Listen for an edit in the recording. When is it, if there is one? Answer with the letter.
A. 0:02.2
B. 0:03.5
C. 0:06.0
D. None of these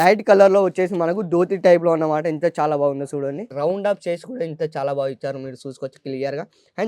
B